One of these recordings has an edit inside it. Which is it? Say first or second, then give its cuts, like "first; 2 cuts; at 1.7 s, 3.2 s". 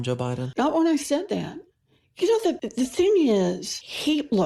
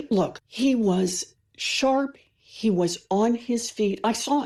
first; 1 cut; at 2.6 s